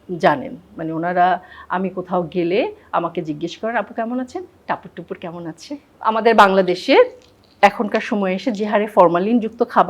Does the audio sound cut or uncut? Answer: cut